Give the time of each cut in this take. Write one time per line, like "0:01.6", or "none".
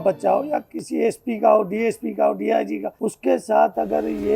0:02.9